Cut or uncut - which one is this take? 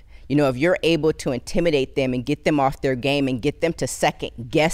uncut